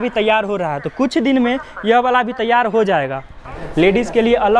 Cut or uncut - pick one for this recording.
cut